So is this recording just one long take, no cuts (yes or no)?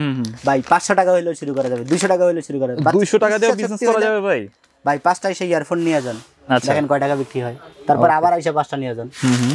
yes